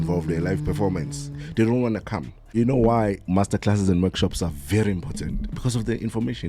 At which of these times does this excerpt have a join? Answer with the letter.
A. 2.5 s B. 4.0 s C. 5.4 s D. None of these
A